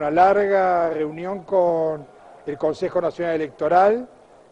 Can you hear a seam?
no; 0 cuts

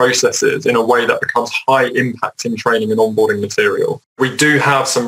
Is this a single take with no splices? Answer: no; 1 cut; at 4.1 s

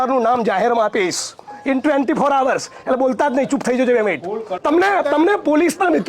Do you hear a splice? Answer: yes; 1 cut; at 4.5 s

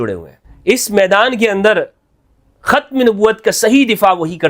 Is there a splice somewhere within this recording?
no; 0 cuts

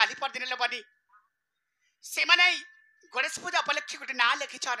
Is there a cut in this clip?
no; 0 cuts

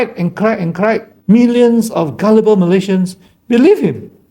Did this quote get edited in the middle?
yes; 1 cut; at 1.1 s

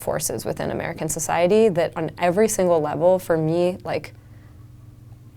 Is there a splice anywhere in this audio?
no; 0 cuts

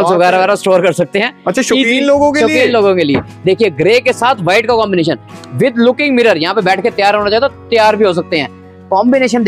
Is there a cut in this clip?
no; 0 cuts

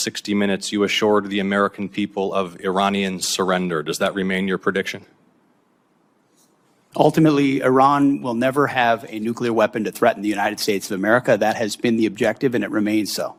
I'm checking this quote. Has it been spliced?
no; 0 cuts

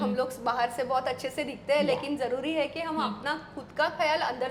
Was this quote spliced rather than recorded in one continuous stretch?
no; 0 cuts

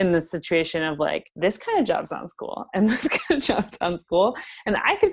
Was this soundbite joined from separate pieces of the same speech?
yes; 1 cut; at 1.3 s

